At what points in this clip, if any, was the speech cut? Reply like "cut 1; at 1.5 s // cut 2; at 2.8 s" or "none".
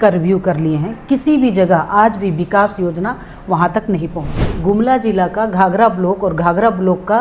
cut 1; at 4.3 s